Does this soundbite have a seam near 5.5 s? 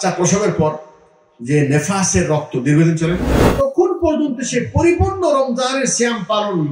no; 1 cut; at 3.4 s

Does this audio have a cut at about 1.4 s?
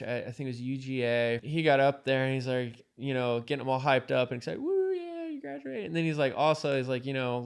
yes; 1 cut; at 1.4 s

